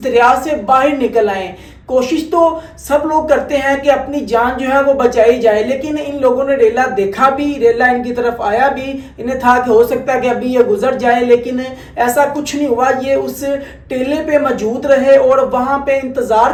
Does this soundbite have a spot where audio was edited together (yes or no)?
no